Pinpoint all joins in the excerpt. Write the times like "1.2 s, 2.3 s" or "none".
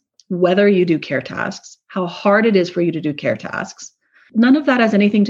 4.2 s